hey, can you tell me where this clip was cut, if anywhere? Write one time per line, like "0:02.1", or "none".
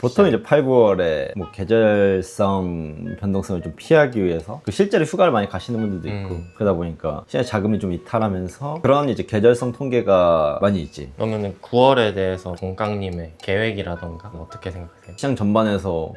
0:08.7
0:15.1